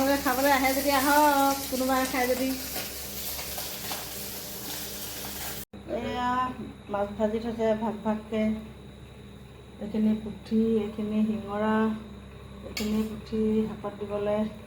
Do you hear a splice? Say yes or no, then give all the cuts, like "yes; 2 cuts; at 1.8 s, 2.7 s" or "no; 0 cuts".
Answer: yes; 1 cut; at 5.7 s